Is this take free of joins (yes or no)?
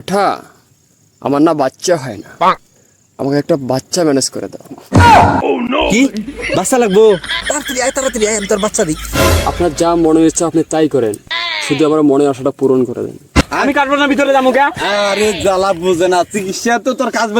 no